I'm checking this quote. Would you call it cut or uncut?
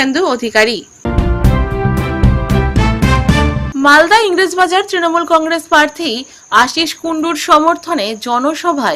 cut